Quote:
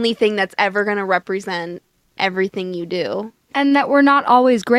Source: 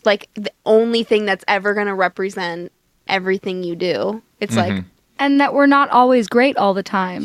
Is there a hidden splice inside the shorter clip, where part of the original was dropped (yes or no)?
yes